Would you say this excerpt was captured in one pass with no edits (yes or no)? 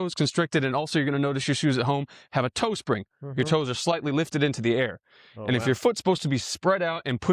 yes